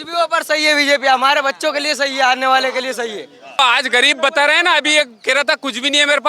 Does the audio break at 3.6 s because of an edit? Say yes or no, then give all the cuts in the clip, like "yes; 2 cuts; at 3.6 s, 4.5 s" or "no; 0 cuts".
yes; 1 cut; at 3.6 s